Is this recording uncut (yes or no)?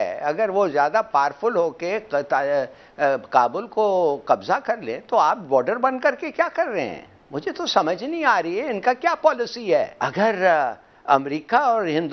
no